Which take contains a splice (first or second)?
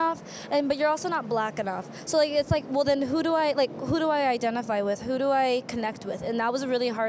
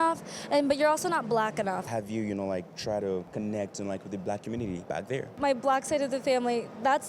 second